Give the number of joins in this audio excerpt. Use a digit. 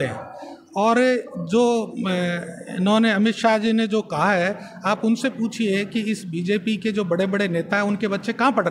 0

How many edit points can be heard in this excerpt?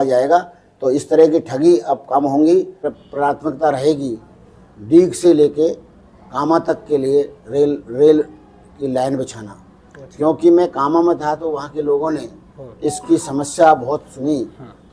1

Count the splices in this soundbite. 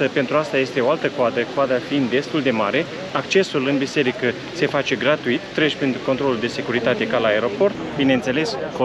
1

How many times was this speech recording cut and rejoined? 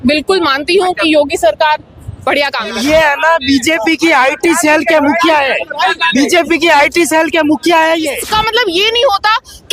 2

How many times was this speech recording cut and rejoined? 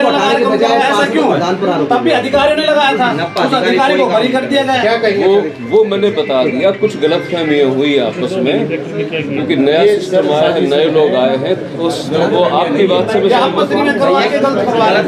0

